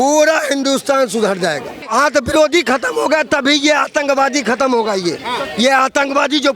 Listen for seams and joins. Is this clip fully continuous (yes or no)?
no